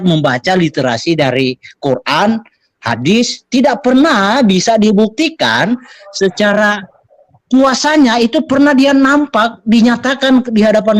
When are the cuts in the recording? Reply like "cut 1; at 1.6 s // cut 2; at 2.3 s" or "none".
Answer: none